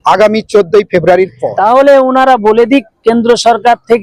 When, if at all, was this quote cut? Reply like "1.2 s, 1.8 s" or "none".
1.4 s